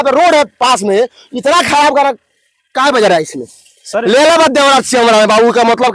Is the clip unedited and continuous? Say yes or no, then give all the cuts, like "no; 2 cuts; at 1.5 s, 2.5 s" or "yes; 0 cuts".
yes; 0 cuts